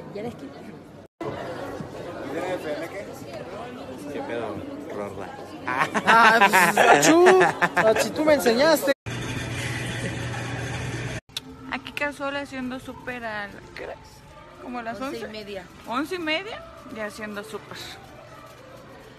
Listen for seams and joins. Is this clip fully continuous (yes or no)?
yes